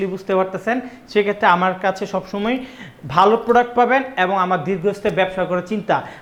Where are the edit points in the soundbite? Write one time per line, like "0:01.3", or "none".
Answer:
none